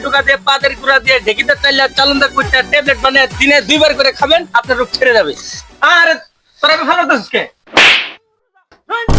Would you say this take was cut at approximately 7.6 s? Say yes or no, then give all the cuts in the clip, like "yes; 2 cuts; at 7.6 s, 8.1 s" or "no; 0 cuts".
yes; 1 cut; at 7.6 s